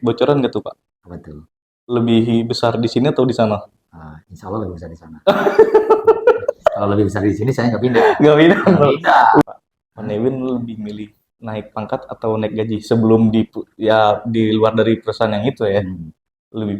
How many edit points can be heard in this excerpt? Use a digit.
1